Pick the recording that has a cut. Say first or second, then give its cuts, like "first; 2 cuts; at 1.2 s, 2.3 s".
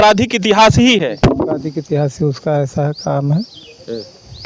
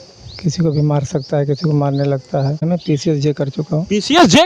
second; 1 cut; at 2.6 s